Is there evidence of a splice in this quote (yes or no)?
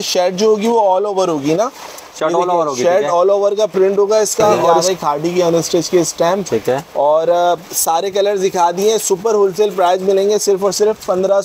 yes